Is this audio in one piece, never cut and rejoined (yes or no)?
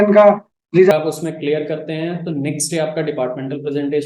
no